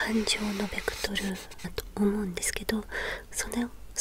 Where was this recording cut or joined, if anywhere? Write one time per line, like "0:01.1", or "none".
0:01.8